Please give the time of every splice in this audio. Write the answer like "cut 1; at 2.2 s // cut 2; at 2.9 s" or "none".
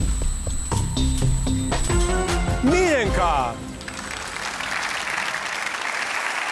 none

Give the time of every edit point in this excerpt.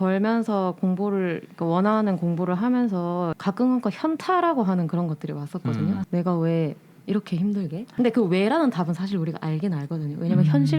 cut 1; at 3.4 s // cut 2; at 6.1 s // cut 3; at 7.9 s

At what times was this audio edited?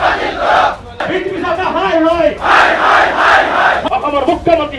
cut 1; at 1.0 s // cut 2; at 3.8 s

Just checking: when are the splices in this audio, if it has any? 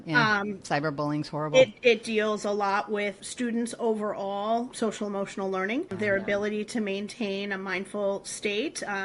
cut 1; at 3.2 s // cut 2; at 4.7 s // cut 3; at 5.9 s

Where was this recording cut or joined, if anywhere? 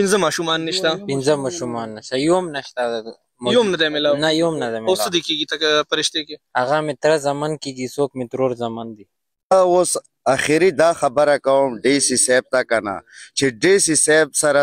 cut 1; at 9.5 s

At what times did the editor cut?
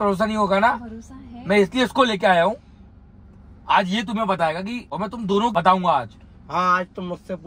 none

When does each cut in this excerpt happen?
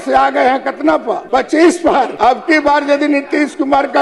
cut 1; at 1.2 s // cut 2; at 2.1 s

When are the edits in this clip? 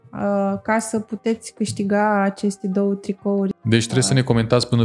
cut 1; at 3.5 s

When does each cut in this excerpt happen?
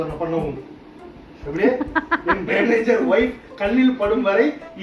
none

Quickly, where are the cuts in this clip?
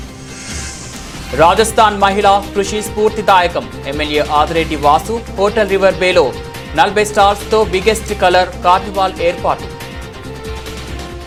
none

